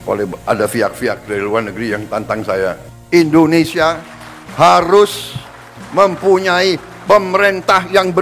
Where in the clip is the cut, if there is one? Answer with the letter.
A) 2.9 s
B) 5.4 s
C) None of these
A